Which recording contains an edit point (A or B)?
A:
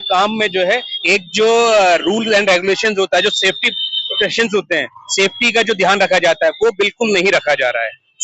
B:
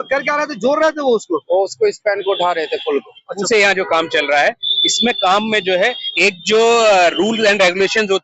B